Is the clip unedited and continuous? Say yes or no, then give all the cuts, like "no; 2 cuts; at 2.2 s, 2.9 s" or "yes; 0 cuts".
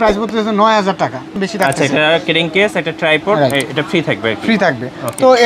no; 1 cut; at 1.3 s